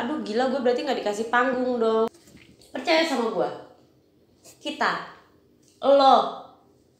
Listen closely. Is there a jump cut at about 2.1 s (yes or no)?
yes